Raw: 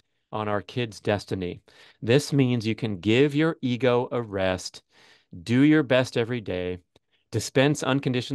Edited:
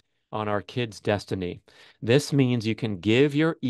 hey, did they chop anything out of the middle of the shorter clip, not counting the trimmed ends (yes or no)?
no